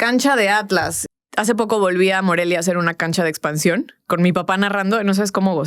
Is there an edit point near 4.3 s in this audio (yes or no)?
no